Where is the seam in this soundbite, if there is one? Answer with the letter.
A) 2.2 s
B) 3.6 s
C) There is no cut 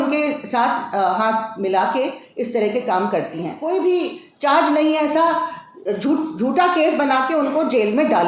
B